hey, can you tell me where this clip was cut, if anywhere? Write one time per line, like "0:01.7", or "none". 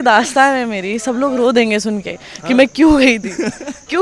none